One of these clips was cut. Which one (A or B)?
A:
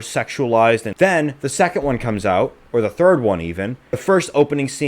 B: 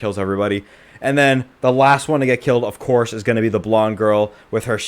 A